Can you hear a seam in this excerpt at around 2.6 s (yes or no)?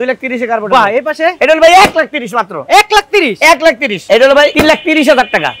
no